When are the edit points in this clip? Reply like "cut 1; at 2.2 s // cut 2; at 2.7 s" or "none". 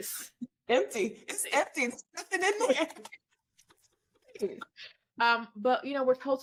none

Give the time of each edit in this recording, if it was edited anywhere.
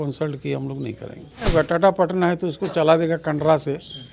cut 1; at 1.5 s

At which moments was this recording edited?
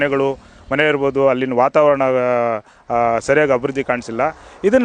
none

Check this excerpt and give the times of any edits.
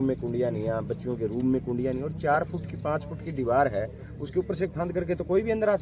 none

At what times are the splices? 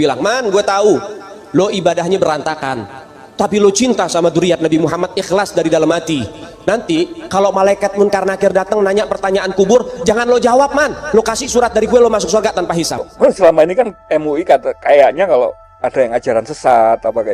cut 1; at 13.1 s

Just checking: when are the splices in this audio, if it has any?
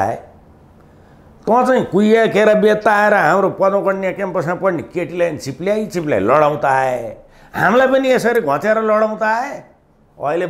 none

